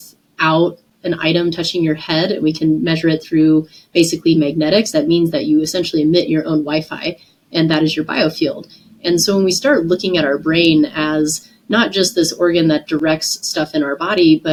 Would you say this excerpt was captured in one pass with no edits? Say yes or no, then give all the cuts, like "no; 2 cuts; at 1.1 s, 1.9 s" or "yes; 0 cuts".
yes; 0 cuts